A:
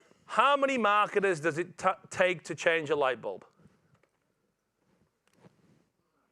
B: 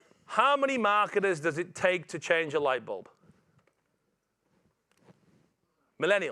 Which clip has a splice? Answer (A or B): B